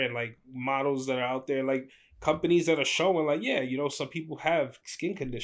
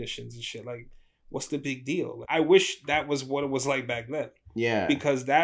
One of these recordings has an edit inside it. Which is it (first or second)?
second